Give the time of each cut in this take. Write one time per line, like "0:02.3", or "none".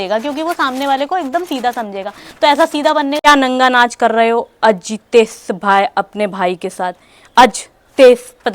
0:03.2